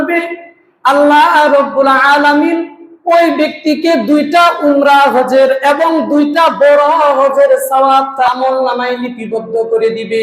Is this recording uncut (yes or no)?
no